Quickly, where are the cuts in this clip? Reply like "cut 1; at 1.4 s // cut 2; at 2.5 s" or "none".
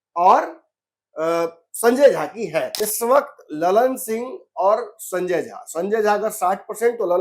cut 1; at 2.8 s